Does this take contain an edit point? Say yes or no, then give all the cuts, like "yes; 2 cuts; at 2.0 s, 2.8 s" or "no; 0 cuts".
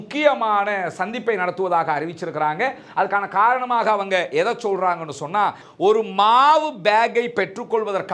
yes; 1 cut; at 5.6 s